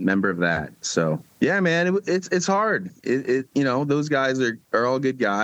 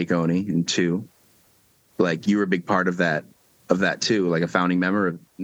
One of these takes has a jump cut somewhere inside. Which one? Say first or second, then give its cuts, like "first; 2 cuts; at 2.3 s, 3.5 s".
first; 1 cut; at 1.3 s